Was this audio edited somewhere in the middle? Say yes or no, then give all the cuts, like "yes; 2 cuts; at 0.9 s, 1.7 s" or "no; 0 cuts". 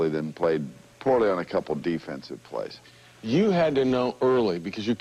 no; 0 cuts